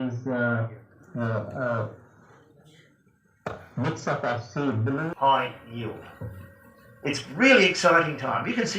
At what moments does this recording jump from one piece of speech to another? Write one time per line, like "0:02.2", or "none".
0:05.1